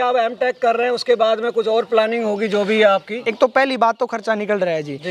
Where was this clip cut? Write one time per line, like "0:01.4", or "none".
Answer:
0:03.2